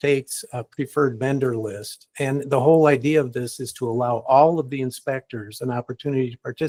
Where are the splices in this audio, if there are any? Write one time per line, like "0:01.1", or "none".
none